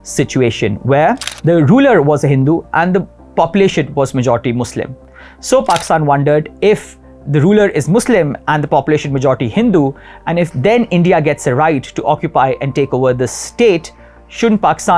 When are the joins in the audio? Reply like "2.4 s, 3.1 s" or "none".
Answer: none